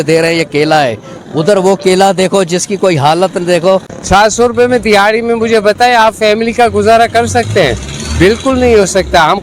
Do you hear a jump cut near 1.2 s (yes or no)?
no